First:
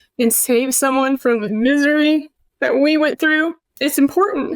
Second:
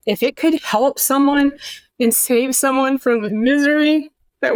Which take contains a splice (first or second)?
first